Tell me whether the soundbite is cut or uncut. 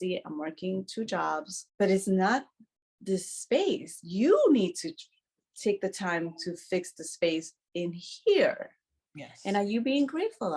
cut